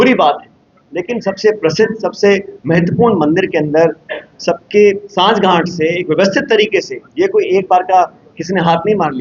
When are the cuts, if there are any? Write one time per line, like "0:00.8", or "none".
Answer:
none